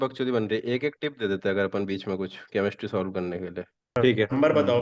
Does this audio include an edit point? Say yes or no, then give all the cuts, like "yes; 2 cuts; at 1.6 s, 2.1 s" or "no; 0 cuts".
no; 0 cuts